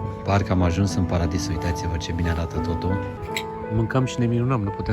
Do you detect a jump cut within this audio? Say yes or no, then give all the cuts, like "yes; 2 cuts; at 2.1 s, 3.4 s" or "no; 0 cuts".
yes; 1 cut; at 3.2 s